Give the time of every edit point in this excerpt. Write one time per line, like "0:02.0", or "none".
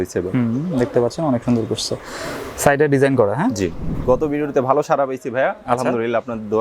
0:03.9